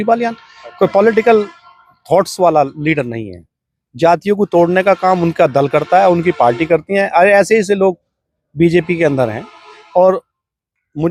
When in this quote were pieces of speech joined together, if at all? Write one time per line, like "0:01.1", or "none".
none